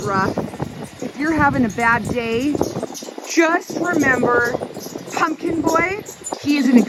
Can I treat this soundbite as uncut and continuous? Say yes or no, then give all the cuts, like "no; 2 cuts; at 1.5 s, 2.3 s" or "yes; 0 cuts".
yes; 0 cuts